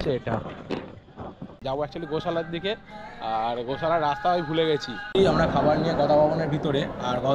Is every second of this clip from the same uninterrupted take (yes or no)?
no